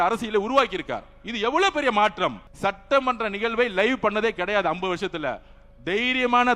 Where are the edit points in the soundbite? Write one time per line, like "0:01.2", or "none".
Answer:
0:02.5